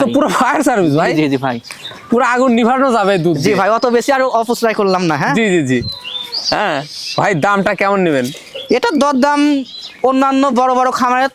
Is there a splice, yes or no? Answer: no